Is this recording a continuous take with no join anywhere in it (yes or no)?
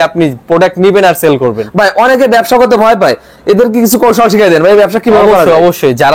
yes